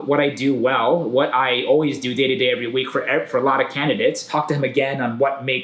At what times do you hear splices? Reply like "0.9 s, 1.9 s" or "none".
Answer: 4.2 s